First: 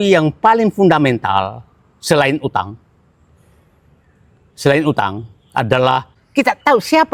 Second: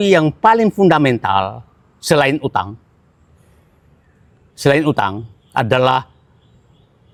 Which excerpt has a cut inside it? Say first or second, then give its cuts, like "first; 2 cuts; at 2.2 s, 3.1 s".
first; 1 cut; at 6.2 s